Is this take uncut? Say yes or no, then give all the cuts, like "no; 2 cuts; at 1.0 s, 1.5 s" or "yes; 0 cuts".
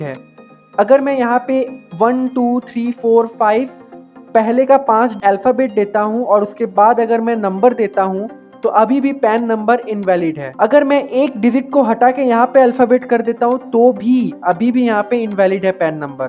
no; 2 cuts; at 5.2 s, 10.5 s